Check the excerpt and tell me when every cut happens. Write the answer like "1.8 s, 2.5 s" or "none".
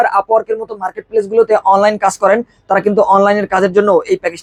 none